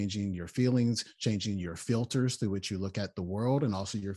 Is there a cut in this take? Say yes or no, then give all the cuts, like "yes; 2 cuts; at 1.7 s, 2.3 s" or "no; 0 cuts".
no; 0 cuts